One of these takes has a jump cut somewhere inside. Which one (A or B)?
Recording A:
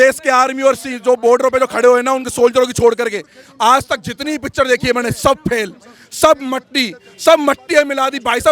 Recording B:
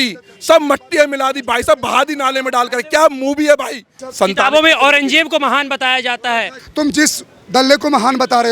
B